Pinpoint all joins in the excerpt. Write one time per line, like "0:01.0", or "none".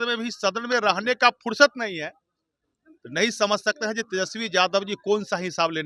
none